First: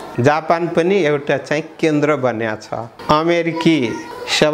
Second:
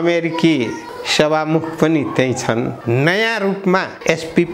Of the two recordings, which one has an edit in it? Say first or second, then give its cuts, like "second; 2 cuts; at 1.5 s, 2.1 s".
second; 1 cut; at 2.8 s